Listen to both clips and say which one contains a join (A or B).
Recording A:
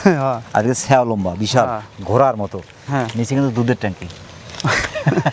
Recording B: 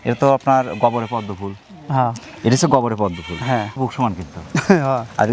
B